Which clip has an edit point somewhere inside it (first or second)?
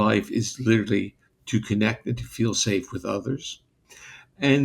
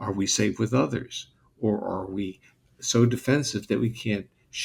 first